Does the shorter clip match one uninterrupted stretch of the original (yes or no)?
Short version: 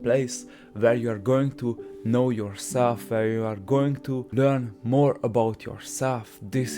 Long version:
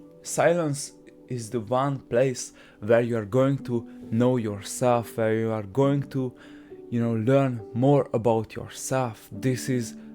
no